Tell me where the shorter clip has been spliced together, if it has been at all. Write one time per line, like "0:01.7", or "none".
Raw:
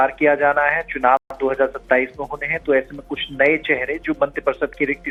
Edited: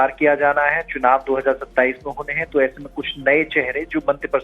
0:01.2